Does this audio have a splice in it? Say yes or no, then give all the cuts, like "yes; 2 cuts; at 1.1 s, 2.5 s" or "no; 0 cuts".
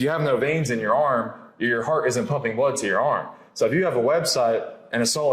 no; 0 cuts